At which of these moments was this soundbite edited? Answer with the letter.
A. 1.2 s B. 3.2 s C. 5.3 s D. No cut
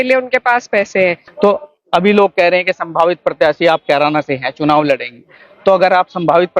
A